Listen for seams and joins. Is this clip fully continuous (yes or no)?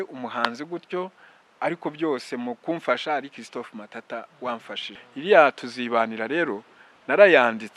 no